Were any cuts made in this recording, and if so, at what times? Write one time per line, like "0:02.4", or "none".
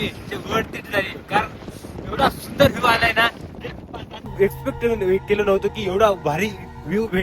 0:04.3

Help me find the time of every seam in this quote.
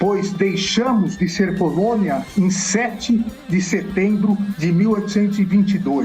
0:02.3
0:04.6

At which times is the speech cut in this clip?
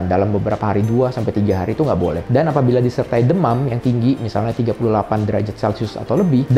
none

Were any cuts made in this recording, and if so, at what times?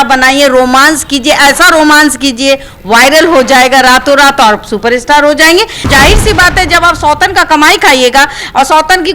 0:05.8

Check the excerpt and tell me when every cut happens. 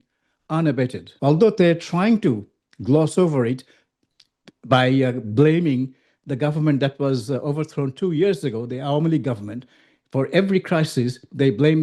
0:01.0

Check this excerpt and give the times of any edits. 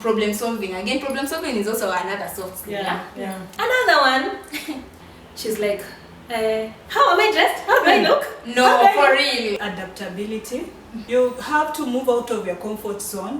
0:03.4
0:04.9
0:09.7
0:11.0

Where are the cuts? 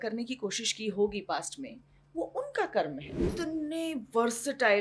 0:03.2

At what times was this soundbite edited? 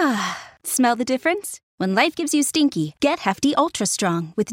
none

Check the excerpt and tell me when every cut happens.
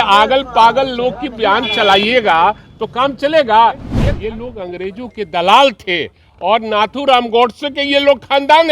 0:03.9

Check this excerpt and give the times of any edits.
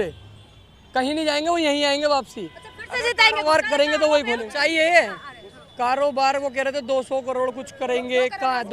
0:04.5

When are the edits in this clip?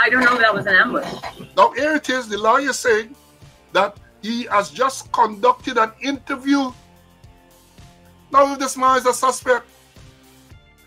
0:01.4

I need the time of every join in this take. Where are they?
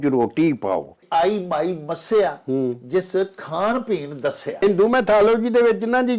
0:01.0
0:04.6

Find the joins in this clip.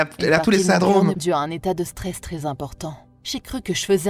0:01.2

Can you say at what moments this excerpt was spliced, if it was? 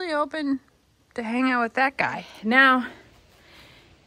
0:02.2

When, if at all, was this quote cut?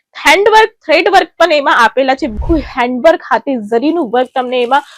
0:02.4

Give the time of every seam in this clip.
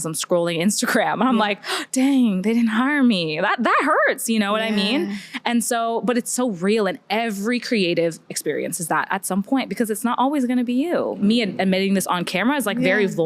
0:11.2

